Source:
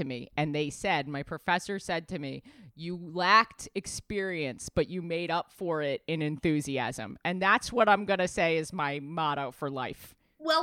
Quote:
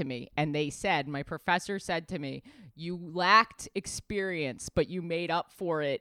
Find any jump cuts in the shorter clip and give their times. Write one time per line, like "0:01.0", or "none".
none